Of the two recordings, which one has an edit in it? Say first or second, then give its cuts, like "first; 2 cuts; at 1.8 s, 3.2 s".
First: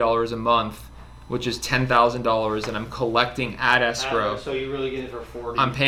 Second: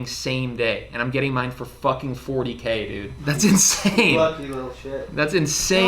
second; 1 cut; at 3.1 s